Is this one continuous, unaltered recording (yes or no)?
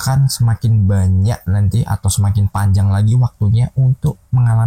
yes